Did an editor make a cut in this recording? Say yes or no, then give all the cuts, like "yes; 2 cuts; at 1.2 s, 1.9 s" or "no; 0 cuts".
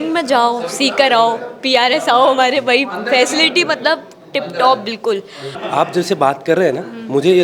yes; 1 cut; at 5.6 s